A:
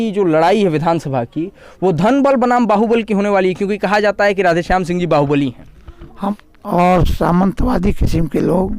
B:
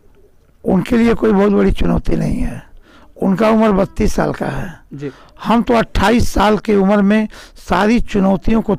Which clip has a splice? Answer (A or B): A